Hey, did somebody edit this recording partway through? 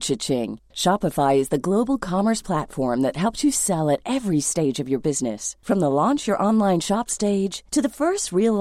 no; 0 cuts

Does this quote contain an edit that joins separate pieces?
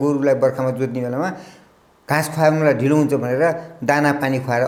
no; 0 cuts

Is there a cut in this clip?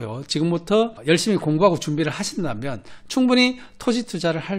yes; 1 cut; at 1.0 s

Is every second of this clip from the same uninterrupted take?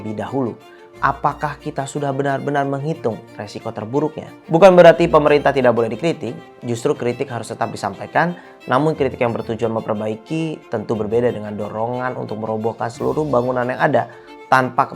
yes; 0 cuts

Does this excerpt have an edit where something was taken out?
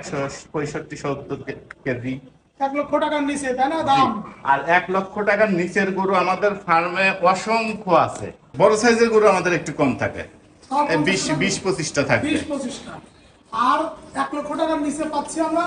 yes; 1 cut; at 8.5 s

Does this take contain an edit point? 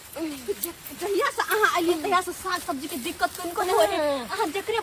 no; 0 cuts

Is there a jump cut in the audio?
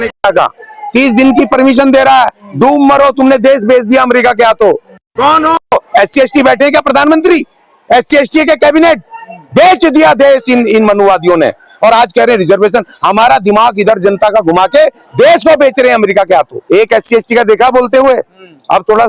yes; 1 cut; at 16.6 s

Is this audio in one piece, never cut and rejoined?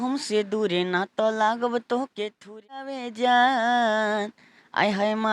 no; 1 cut; at 3.0 s

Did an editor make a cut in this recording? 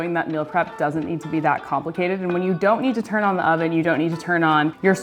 no; 0 cuts

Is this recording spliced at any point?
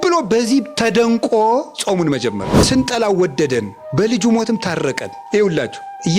yes; 1 cut; at 2.5 s

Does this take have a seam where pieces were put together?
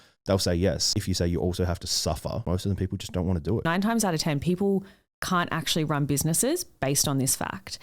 yes; 3 cuts; at 0.9 s, 2.4 s, 3.7 s

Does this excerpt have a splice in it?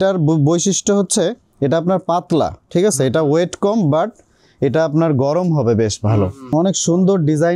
yes; 1 cut; at 6.5 s

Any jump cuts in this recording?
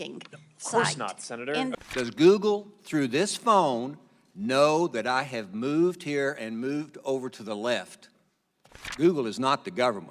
yes; 2 cuts; at 1.7 s, 8.9 s

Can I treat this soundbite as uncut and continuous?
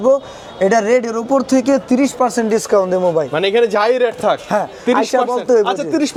yes; 0 cuts

